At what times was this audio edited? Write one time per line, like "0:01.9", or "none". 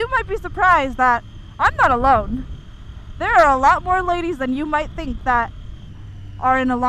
none

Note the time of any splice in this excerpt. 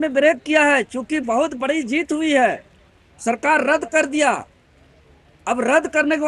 none

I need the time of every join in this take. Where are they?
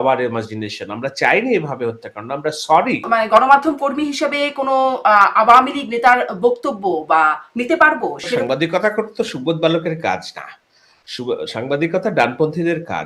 0:03.1
0:08.4

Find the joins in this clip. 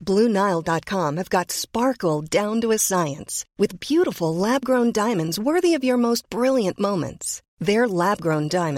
none

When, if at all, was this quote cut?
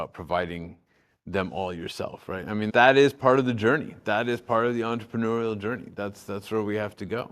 0:02.7

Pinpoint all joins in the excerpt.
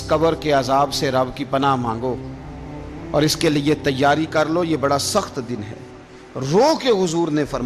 none

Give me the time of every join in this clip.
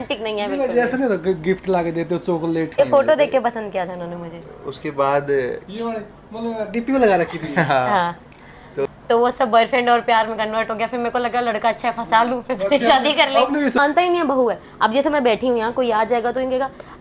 0:02.7
0:08.9
0:13.8

